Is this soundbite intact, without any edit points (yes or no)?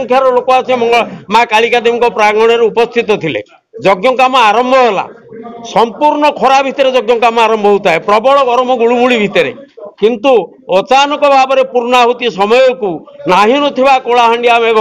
yes